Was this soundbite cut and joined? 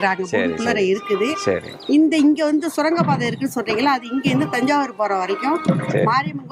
no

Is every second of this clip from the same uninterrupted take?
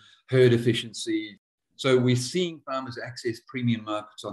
no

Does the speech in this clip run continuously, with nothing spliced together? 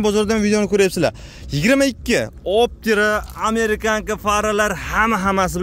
yes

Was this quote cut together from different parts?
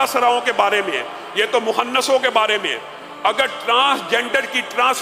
no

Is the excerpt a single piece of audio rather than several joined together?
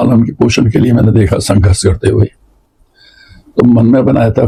yes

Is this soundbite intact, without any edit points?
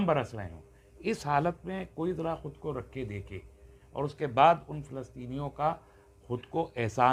yes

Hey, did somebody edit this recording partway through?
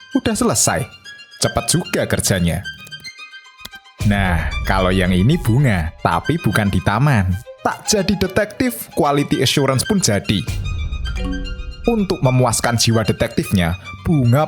yes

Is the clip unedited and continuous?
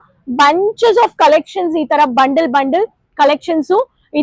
yes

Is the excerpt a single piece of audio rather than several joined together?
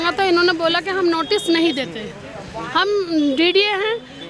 yes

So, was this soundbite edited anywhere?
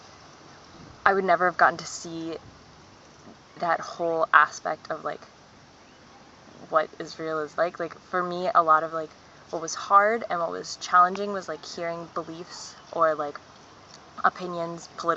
no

